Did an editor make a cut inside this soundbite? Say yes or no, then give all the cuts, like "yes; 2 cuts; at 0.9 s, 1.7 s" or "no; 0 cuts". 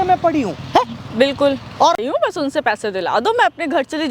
yes; 1 cut; at 2.0 s